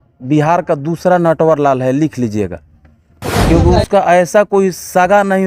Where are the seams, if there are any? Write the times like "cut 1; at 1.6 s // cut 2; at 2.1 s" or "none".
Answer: cut 1; at 3.3 s